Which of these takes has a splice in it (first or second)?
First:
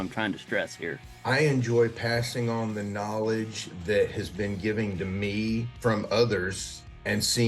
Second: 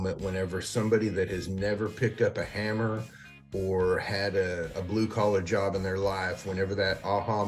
first